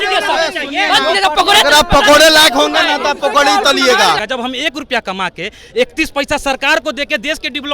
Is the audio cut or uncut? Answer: cut